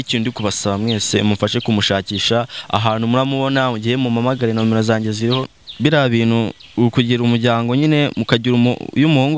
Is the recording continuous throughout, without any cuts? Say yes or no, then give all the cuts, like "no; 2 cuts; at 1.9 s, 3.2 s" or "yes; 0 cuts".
no; 1 cut; at 5.6 s